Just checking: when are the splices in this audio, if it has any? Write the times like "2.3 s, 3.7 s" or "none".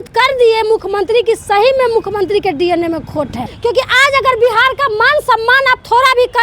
3.5 s